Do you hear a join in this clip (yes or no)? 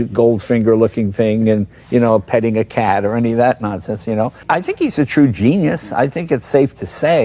yes